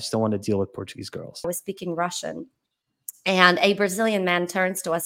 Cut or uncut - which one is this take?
cut